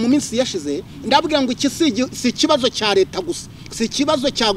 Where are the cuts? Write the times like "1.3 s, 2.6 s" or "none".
none